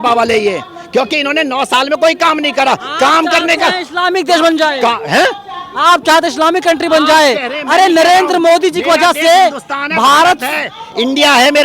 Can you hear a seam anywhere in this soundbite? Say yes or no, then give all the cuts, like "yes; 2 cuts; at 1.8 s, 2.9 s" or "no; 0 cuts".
no; 0 cuts